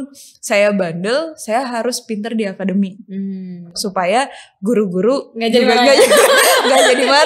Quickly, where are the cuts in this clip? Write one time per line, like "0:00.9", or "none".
none